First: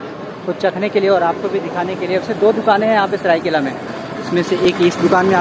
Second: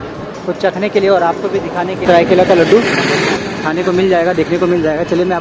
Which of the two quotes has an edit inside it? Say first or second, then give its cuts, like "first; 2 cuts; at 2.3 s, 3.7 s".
second; 1 cut; at 2.0 s